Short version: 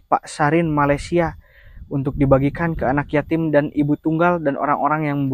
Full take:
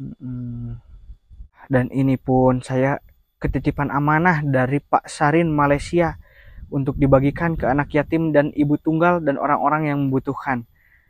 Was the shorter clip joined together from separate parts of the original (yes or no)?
no